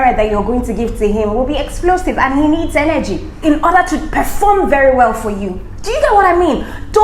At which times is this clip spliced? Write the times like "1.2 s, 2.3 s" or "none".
3.3 s